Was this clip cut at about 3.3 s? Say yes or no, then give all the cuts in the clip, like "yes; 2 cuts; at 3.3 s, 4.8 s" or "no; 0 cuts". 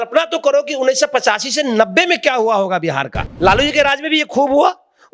yes; 1 cut; at 3.3 s